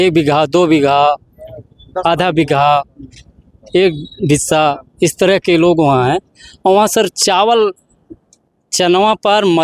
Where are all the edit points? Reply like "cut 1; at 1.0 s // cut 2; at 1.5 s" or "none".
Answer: none